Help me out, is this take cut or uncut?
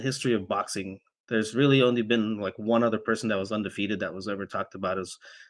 uncut